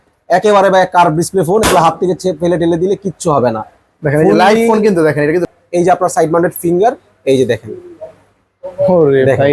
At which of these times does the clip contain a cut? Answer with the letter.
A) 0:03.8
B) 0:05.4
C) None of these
B